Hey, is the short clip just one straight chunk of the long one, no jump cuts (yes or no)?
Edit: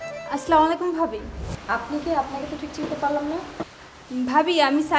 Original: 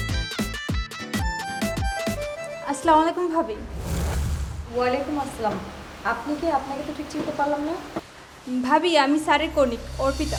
no